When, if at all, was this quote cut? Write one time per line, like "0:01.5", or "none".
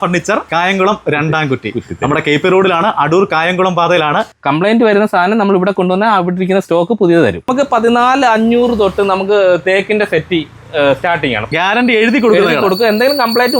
0:04.3
0:07.4
0:11.5